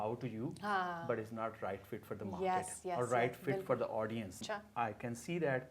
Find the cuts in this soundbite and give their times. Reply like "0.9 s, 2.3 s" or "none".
4.4 s